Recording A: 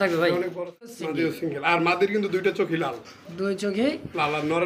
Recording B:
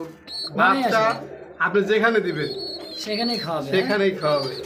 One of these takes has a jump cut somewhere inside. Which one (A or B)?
A